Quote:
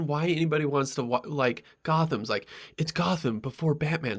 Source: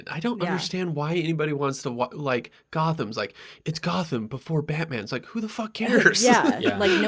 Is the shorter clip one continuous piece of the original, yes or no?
yes